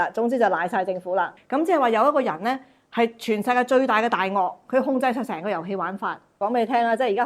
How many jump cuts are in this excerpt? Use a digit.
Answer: 2